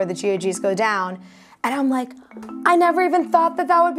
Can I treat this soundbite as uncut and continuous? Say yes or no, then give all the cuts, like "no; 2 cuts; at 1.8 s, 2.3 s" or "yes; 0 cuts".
yes; 0 cuts